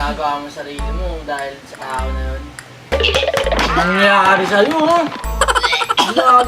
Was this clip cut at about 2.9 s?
yes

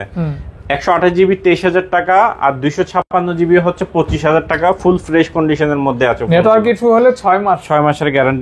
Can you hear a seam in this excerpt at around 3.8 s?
no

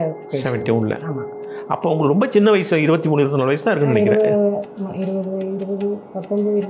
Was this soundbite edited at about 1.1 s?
no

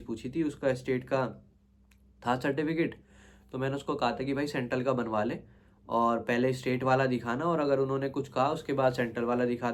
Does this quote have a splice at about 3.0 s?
no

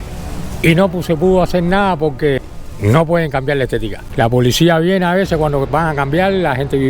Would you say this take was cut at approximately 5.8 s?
no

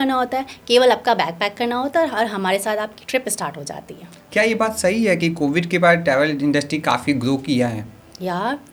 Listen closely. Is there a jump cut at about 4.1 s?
no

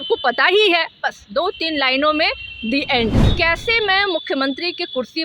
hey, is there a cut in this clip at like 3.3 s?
yes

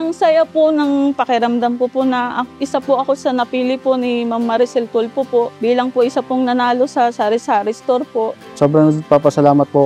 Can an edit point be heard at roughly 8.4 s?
yes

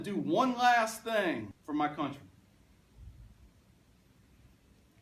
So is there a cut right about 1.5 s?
yes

